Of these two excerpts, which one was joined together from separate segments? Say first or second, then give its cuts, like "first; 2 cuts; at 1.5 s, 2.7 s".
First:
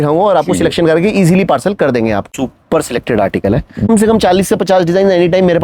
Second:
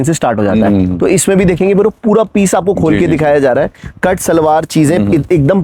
first; 2 cuts; at 2.3 s, 3.9 s